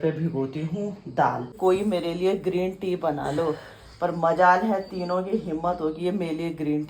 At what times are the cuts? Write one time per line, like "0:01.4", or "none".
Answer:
0:01.6